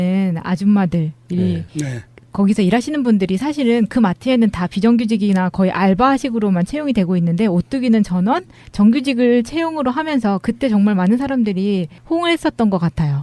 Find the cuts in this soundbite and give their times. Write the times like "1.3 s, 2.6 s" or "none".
3.4 s

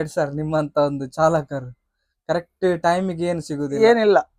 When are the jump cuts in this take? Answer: none

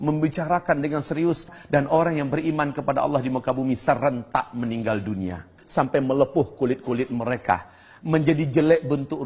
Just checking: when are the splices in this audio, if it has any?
1.5 s, 5.6 s

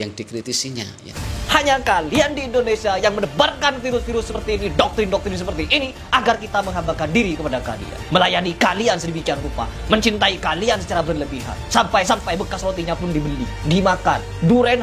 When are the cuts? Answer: 1.1 s

